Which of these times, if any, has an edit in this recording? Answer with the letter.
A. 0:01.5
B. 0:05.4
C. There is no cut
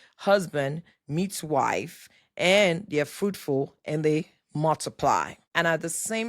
B